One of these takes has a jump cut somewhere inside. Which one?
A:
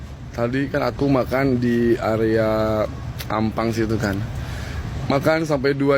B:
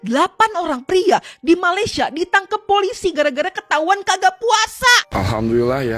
B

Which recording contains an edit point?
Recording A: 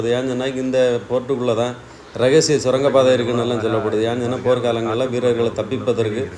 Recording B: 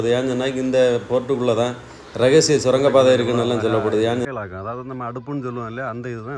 B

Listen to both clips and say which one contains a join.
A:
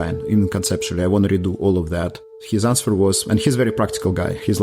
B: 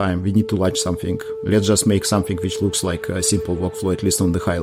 A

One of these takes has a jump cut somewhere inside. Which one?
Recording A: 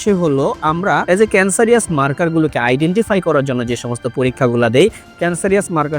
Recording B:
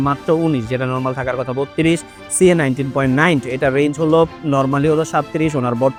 A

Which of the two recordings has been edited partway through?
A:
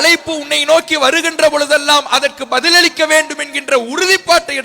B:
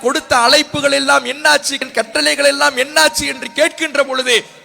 B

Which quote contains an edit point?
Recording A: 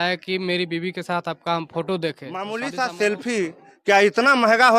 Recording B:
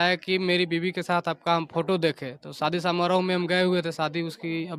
A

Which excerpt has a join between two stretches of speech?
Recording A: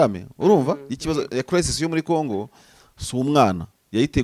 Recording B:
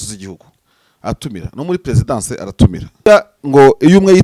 B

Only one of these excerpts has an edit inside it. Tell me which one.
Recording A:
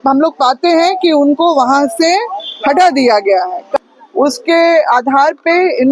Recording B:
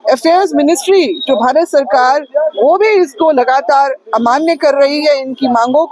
A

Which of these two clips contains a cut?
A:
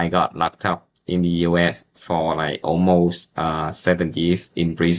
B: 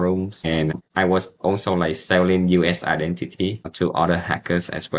B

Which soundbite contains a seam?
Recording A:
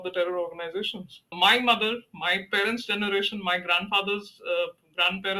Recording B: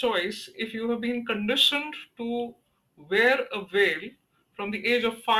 A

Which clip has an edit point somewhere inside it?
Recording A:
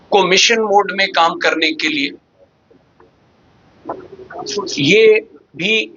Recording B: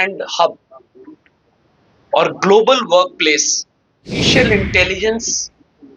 B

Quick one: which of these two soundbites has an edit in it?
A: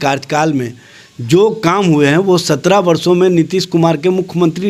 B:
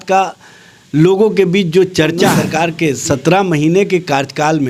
B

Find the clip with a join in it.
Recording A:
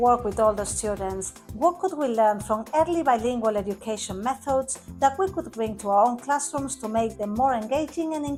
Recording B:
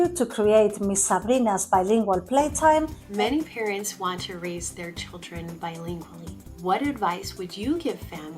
B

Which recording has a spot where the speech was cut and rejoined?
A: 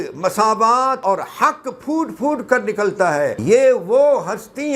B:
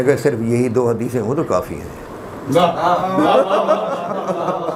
A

